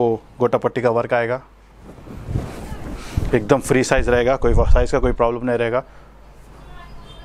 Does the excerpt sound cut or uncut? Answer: uncut